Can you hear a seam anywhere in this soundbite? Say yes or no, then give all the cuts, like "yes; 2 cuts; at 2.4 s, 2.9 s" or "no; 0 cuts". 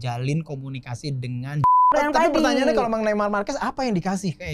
yes; 1 cut; at 1.9 s